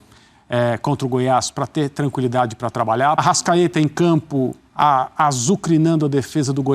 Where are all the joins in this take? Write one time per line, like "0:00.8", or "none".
0:03.2